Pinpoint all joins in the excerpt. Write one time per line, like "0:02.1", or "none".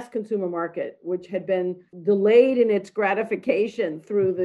0:01.9